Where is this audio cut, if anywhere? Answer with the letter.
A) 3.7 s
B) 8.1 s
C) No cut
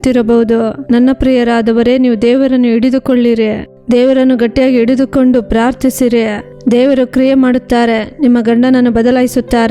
A